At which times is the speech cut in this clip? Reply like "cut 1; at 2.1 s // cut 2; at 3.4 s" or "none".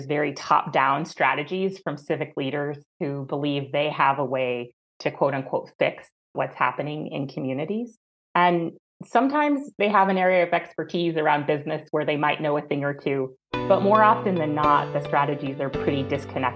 none